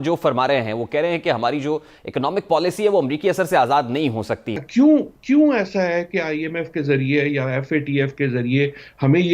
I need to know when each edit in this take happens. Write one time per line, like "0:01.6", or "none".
0:04.5